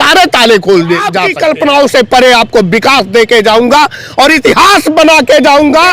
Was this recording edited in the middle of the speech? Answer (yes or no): yes